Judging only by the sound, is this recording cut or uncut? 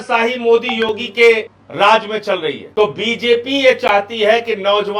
cut